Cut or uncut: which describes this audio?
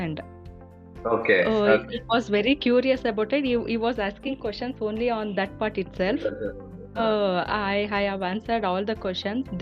uncut